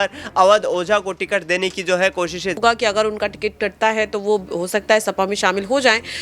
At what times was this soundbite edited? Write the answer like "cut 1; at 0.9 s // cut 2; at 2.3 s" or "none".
cut 1; at 2.6 s